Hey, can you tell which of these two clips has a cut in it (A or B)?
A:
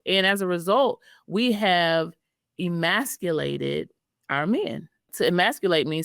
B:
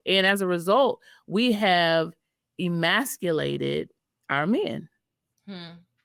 A